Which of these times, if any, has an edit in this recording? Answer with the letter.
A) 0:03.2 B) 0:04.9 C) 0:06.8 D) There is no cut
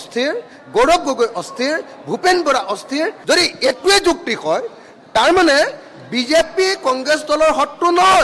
A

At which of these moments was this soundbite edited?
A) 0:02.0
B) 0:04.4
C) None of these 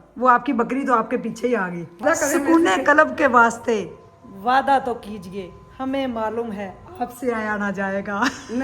A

